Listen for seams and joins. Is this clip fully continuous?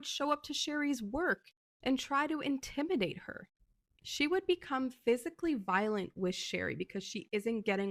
yes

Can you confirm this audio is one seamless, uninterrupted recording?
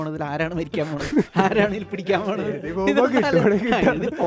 yes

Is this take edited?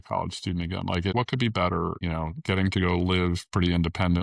yes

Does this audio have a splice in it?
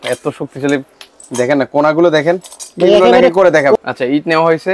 yes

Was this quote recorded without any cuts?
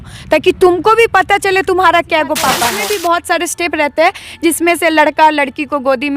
no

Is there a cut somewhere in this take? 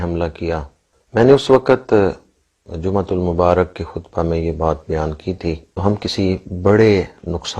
yes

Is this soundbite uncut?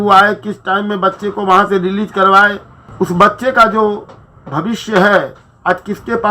no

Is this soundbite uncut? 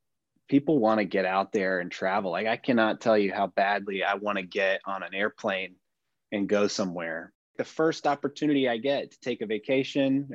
no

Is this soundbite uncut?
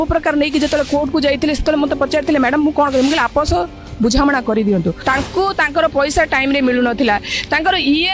no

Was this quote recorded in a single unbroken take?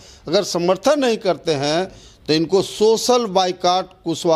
yes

